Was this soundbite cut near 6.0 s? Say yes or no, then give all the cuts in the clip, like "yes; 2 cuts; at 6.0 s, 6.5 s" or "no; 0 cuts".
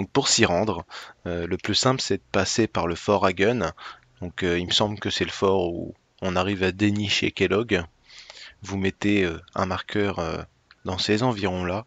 no; 0 cuts